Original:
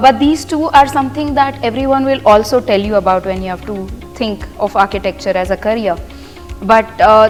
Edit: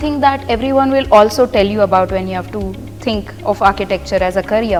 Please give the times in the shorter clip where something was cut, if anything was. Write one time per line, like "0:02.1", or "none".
none